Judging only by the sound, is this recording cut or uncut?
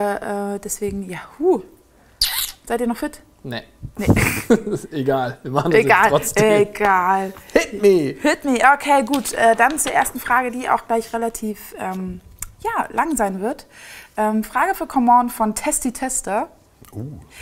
cut